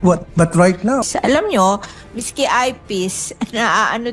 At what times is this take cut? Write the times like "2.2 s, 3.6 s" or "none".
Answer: 1.0 s